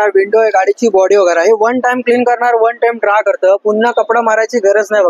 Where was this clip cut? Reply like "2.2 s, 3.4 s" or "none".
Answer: none